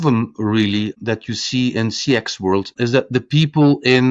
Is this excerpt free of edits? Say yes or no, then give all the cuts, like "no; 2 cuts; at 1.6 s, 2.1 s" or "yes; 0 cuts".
no; 2 cuts; at 1.0 s, 2.7 s